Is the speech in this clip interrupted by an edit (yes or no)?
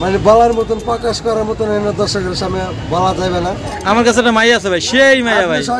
yes